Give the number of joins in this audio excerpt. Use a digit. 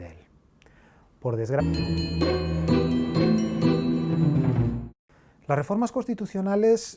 0